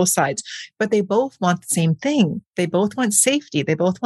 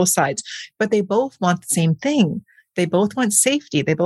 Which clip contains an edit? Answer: first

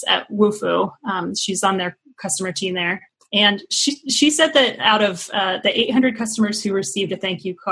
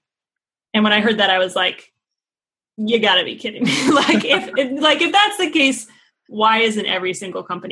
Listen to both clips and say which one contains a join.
first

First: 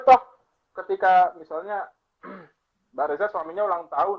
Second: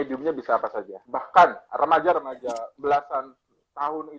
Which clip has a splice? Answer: second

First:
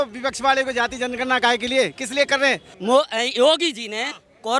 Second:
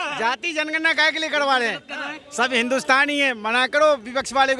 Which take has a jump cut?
first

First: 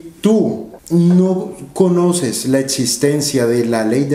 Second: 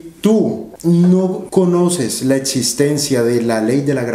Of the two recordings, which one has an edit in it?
second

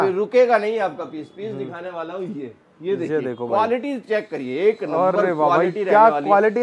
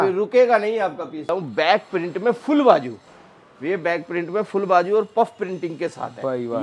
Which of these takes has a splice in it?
second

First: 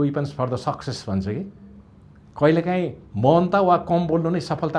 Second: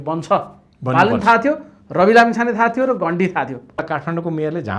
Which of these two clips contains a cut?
second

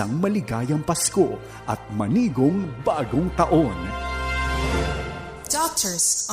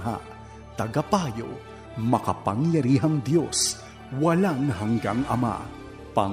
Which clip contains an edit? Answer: first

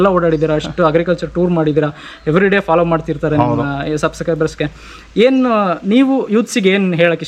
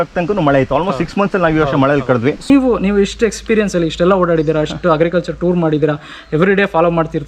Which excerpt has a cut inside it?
second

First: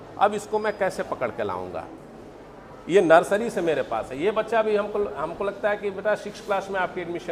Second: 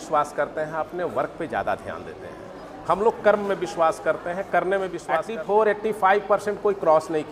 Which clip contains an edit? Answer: second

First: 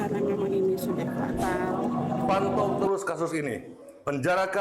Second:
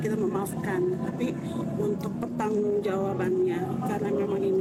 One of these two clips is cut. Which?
first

